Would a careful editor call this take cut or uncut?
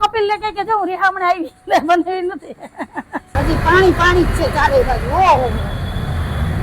cut